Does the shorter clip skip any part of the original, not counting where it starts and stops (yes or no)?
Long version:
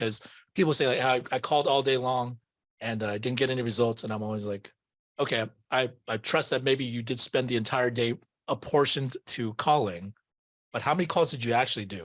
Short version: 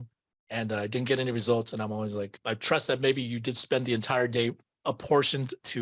yes